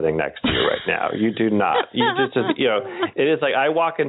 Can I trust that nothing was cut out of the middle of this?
yes; 0 cuts

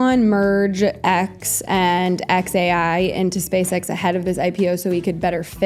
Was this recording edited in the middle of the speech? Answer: no; 0 cuts

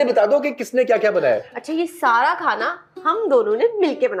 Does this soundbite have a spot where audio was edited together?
no; 0 cuts

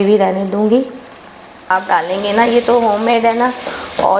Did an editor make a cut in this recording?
yes; 1 cut; at 1.7 s

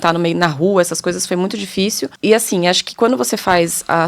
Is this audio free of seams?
no; 1 cut; at 2.1 s

